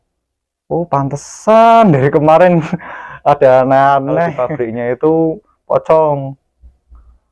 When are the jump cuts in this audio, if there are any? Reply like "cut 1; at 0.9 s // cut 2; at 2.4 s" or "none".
cut 1; at 4.3 s